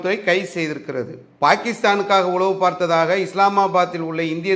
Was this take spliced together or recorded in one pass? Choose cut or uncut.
uncut